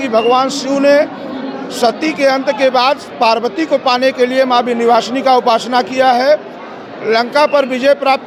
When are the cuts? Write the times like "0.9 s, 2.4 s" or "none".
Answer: none